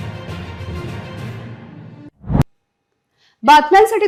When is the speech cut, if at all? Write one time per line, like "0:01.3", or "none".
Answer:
none